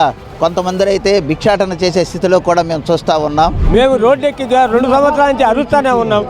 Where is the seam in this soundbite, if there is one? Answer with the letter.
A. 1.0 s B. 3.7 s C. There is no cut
B